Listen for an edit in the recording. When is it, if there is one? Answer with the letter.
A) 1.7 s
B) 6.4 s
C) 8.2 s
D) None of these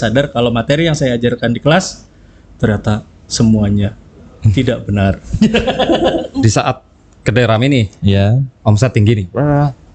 B